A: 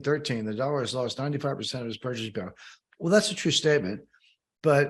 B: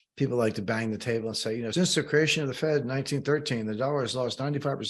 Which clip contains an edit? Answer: B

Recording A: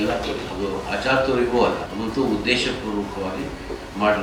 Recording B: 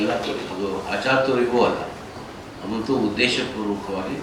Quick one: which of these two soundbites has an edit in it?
A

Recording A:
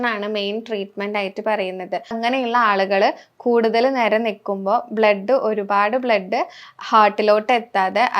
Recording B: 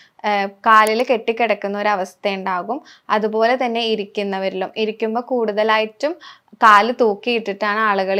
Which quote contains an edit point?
A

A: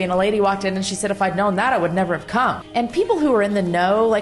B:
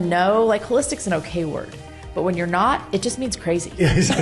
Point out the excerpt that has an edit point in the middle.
A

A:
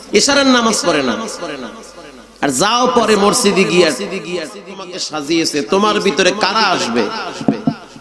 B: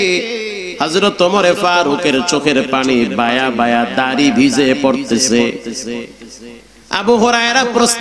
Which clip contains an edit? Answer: A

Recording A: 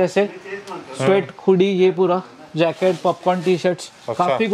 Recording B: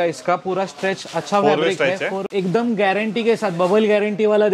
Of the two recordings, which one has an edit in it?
B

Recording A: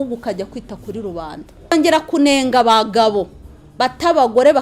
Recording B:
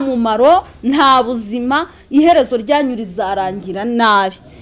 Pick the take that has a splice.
A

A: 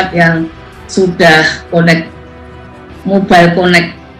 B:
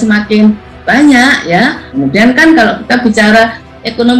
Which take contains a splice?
B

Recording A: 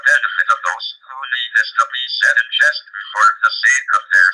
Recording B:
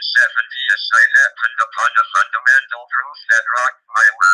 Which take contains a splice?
B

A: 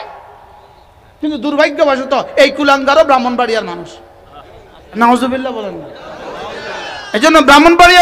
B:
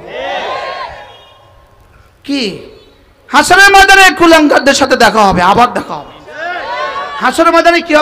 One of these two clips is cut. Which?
A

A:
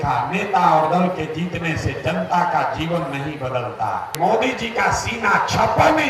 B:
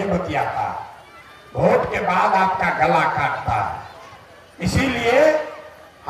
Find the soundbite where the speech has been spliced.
A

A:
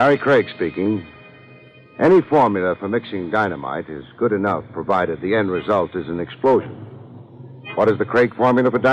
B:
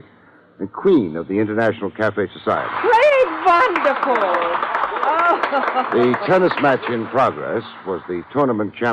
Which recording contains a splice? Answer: B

